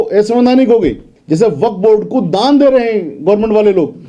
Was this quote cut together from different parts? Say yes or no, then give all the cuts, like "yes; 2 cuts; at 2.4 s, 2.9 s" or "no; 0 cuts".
yes; 1 cut; at 1.1 s